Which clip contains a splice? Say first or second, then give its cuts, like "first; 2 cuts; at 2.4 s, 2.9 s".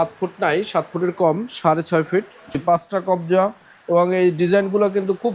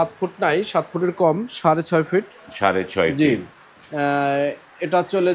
first; 1 cut; at 2.6 s